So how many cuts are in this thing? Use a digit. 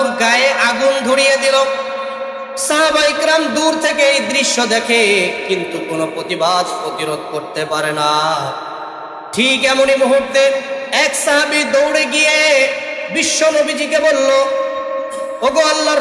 0